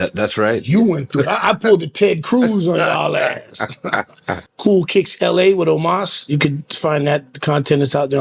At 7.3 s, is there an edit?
no; 1 cut; at 4.5 s

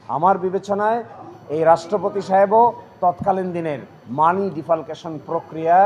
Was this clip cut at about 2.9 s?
no; 0 cuts

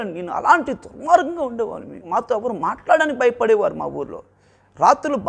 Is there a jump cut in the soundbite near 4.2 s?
no; 1 cut; at 1.9 s

